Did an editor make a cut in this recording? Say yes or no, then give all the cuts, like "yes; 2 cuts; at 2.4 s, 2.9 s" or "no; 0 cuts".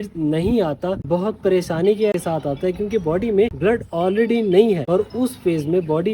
yes; 4 cuts; at 1.0 s, 2.1 s, 3.5 s, 4.8 s